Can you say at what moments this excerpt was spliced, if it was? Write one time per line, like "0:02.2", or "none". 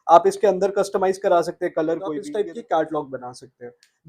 0:02.2